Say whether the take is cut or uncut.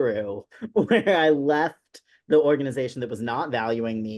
uncut